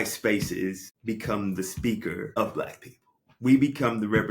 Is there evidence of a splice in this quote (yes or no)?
yes